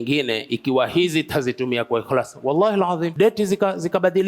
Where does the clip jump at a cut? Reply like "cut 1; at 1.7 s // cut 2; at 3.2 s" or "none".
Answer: cut 1; at 3.1 s